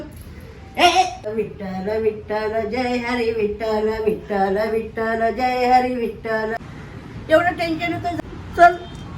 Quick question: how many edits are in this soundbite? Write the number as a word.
three